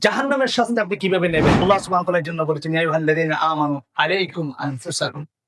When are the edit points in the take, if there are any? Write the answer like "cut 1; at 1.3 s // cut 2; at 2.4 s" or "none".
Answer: cut 1; at 1.6 s